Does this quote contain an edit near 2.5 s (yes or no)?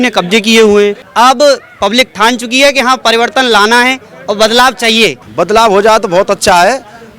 no